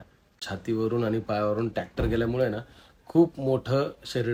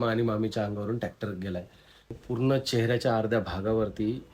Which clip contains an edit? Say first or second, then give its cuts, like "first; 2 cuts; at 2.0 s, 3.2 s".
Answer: second; 1 cut; at 2.2 s